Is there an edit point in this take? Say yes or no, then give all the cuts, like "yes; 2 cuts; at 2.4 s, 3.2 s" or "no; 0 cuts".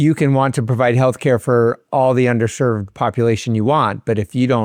no; 0 cuts